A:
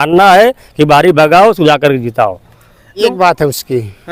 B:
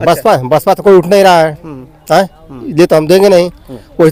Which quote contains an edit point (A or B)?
A